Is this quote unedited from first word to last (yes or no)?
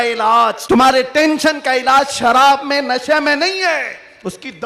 no